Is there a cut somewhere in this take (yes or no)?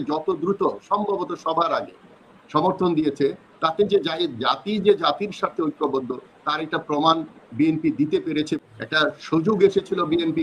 yes